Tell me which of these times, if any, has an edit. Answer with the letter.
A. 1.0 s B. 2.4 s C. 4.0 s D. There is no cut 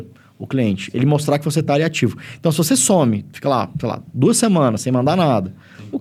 D